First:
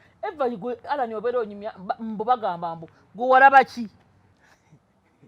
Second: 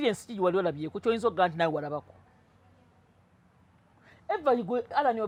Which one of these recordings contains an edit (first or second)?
first